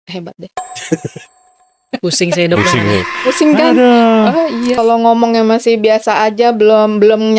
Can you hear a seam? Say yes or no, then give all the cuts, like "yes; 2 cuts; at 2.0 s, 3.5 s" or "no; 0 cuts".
yes; 1 cut; at 4.8 s